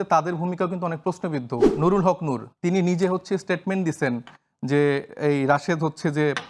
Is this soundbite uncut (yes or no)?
no